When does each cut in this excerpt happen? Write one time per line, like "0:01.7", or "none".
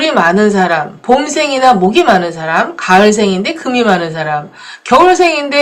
none